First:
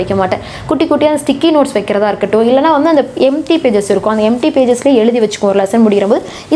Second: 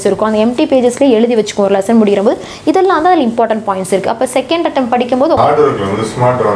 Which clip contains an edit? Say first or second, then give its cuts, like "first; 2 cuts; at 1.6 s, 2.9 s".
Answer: second; 1 cut; at 5.4 s